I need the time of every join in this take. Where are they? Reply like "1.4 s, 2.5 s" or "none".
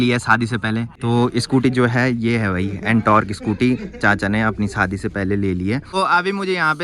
none